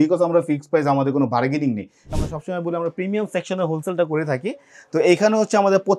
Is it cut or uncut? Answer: cut